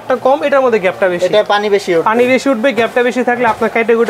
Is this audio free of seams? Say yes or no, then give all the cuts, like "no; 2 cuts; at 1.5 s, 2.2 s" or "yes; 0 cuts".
yes; 0 cuts